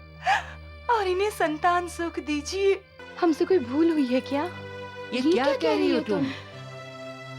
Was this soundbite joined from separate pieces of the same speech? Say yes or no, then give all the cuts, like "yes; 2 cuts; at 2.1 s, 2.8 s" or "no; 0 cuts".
yes; 1 cut; at 3.0 s